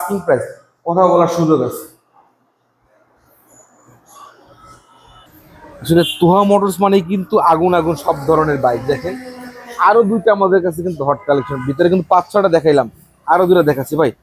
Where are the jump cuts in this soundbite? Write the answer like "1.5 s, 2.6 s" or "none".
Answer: none